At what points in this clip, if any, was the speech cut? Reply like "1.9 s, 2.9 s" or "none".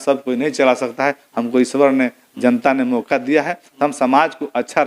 none